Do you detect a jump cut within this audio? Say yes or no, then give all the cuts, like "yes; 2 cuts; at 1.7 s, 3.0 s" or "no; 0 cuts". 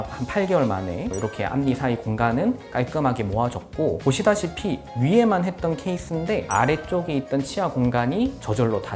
no; 0 cuts